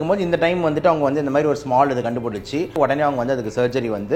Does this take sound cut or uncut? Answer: cut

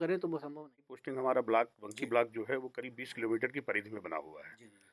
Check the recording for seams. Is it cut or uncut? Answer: cut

